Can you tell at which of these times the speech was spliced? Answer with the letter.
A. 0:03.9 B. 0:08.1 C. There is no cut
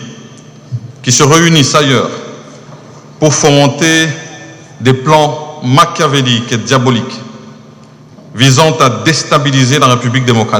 C